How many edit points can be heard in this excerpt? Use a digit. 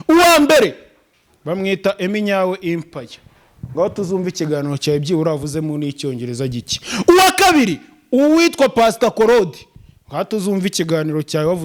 0